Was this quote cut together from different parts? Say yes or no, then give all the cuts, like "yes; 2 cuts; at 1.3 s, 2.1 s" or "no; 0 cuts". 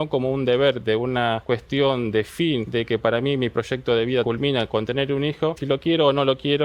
yes; 4 cuts; at 1.4 s, 2.7 s, 4.2 s, 5.6 s